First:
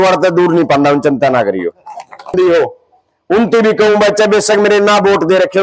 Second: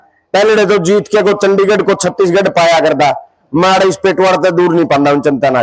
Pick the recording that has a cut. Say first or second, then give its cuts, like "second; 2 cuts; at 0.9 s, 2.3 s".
first; 1 cut; at 2.3 s